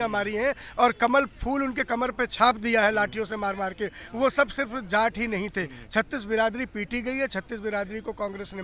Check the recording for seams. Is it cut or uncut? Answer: uncut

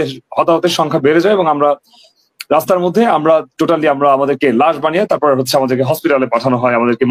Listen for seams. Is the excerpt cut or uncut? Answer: uncut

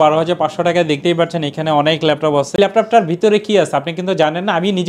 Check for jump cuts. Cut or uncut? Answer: cut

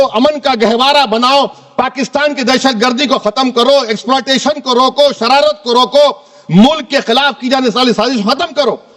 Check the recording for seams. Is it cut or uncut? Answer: uncut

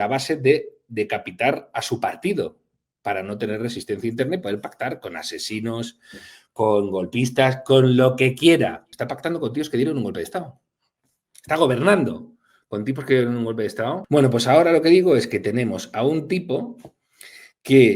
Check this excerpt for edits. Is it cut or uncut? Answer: cut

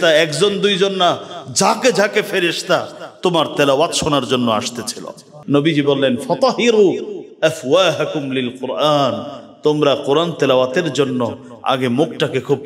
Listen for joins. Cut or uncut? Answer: cut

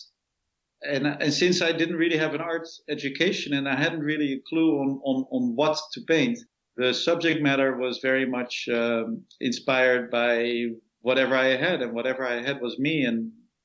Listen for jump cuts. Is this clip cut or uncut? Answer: cut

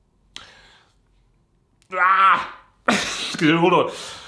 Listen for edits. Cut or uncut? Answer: uncut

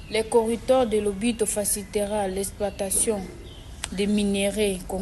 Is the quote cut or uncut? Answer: uncut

